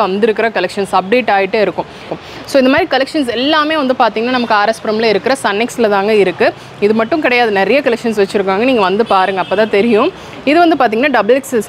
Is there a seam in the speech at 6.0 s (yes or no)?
no